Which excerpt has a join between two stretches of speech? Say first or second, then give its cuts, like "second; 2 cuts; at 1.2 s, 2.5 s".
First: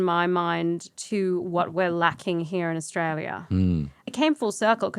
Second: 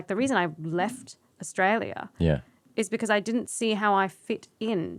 first; 2 cuts; at 0.9 s, 4.0 s